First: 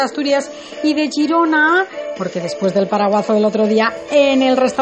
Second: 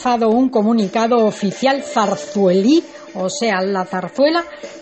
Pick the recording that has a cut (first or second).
first